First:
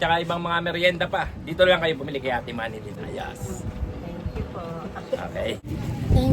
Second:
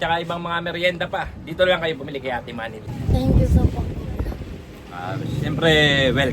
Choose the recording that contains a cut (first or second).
second